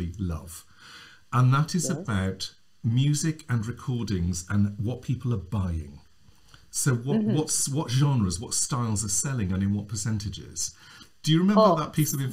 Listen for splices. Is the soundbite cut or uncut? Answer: uncut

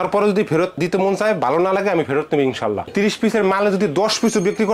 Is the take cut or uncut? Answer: cut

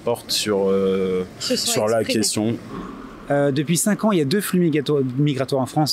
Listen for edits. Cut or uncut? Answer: cut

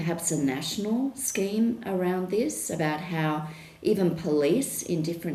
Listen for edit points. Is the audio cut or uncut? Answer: uncut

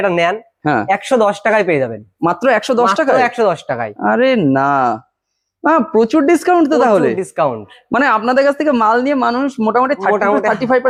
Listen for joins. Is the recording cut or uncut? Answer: uncut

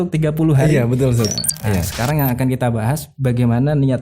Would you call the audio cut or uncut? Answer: cut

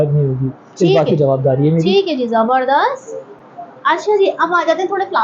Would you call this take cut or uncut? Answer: uncut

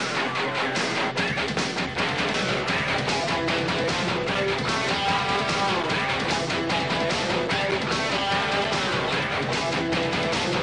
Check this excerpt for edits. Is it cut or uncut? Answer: uncut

